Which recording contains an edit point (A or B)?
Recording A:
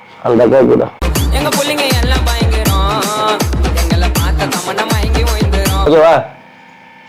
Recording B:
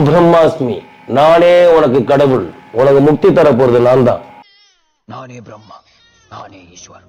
A